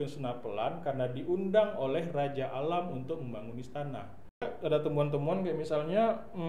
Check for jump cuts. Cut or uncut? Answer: cut